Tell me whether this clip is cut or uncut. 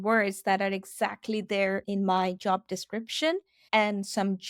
cut